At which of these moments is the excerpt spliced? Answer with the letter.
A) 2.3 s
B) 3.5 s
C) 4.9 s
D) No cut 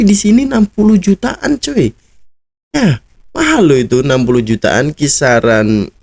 D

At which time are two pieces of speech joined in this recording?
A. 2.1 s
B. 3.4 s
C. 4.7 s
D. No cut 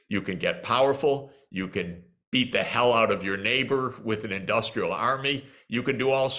D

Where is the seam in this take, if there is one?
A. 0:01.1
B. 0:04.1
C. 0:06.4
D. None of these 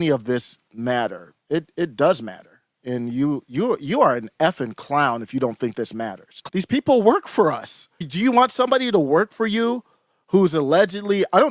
C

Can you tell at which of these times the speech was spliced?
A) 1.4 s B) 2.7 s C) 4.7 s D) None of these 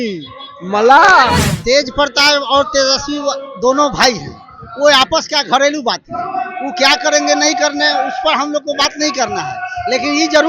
A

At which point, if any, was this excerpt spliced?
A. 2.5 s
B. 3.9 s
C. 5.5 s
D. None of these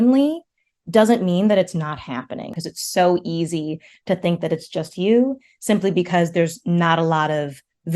A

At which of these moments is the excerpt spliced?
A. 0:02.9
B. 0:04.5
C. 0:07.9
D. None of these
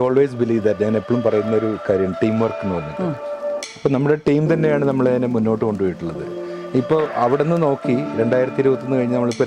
D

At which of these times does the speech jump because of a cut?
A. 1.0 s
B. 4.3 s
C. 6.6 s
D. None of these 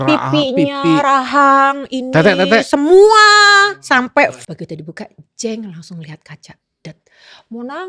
B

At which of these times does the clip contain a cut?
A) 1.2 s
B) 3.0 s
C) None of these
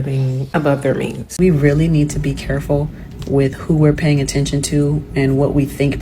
A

